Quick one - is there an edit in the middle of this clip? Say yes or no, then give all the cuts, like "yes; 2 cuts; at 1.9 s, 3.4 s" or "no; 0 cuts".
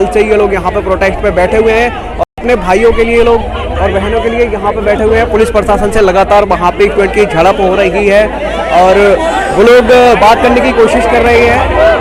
no; 0 cuts